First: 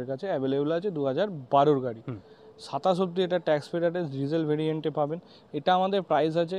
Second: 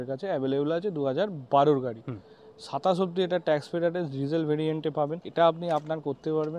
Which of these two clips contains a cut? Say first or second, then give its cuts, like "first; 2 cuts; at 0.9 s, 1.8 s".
second; 1 cut; at 5.2 s